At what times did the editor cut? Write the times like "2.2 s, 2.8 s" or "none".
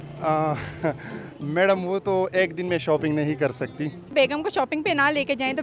4.1 s